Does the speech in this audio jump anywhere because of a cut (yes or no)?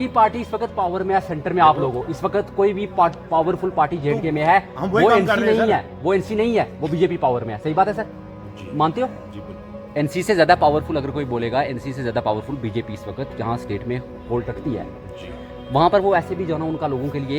no